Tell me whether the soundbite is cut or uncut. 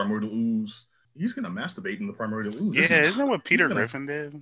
cut